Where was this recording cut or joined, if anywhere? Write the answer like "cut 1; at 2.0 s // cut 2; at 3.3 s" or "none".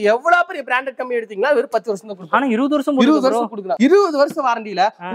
none